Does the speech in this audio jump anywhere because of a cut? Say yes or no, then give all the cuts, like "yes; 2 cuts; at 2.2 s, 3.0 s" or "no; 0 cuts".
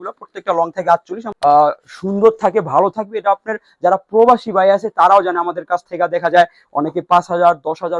yes; 1 cut; at 1.3 s